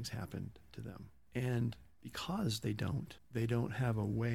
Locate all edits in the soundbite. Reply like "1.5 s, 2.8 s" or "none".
3.1 s

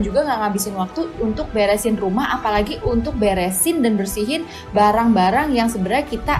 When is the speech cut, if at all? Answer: none

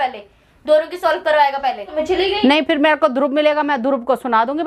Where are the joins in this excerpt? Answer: 1.9 s

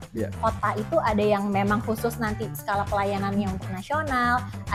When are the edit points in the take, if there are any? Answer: none

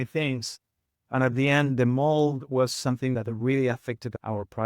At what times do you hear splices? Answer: 3.1 s

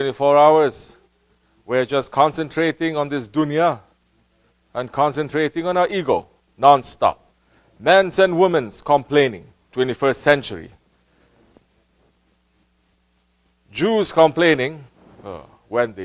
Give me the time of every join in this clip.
15.1 s

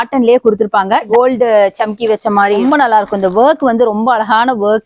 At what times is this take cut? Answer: 1.1 s

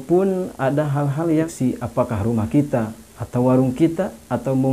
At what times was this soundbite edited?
1.5 s

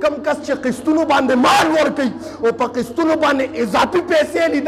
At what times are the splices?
none

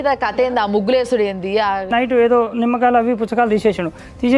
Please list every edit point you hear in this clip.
1.9 s

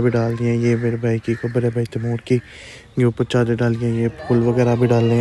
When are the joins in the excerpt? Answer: none

